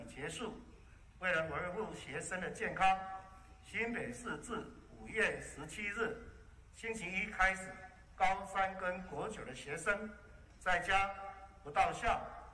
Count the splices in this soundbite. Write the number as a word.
zero